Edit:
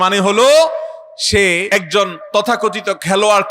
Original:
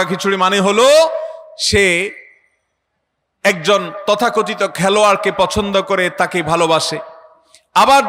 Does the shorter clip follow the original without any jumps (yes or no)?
no